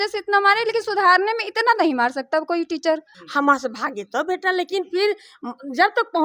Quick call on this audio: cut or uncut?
cut